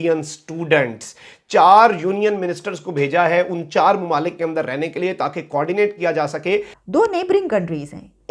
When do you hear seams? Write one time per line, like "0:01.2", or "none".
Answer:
0:06.7